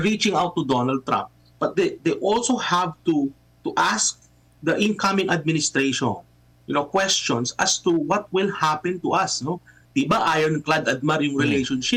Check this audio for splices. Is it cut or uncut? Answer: uncut